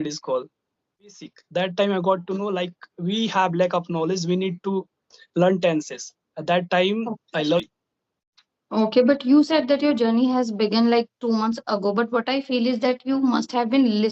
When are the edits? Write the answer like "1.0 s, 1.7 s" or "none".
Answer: 1.2 s, 7.6 s